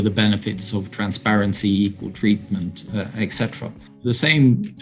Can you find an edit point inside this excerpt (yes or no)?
yes